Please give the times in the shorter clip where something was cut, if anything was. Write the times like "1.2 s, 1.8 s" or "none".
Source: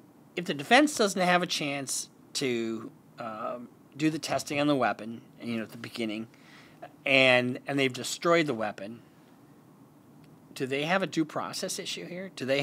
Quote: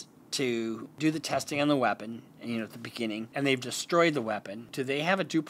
0.9 s, 3.3 s, 4.6 s

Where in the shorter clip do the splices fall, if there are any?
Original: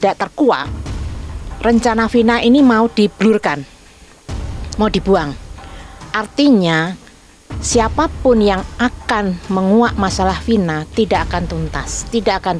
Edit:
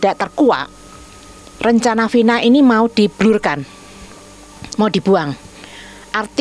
none

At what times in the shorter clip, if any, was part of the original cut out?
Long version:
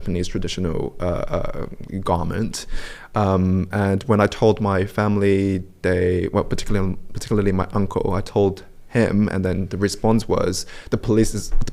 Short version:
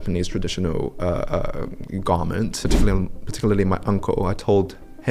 2.7 s

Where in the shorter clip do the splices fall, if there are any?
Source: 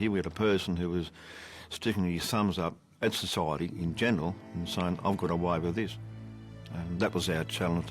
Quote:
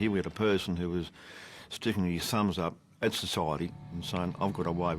3.7 s

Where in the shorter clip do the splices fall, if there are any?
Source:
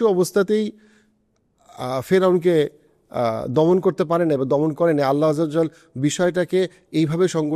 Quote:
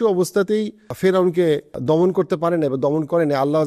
0.9 s, 1.7 s

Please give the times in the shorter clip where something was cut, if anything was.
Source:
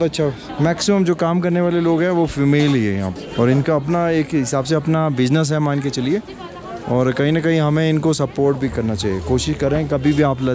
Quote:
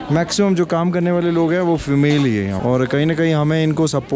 2.6 s

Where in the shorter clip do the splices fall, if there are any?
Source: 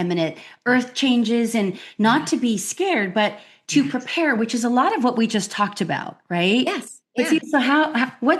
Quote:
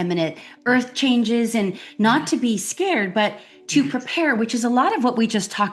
none

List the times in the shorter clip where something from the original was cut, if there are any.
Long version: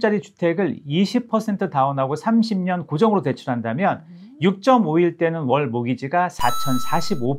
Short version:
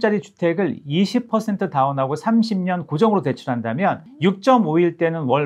4.1 s

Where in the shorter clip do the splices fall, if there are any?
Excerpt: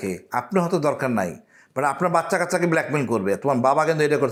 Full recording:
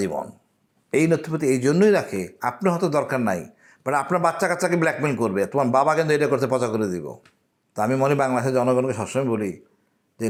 none

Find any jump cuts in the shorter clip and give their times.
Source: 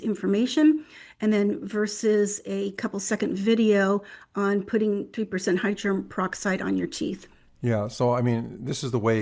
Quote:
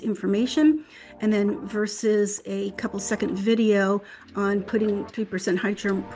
none

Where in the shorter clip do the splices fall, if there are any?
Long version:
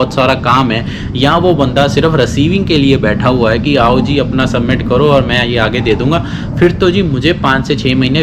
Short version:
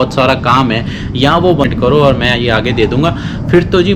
1.7 s

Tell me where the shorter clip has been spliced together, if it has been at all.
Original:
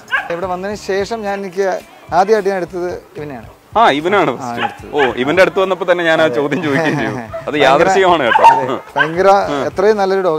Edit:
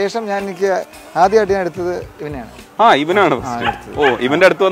none

